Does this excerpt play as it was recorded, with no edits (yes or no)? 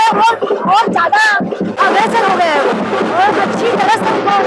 no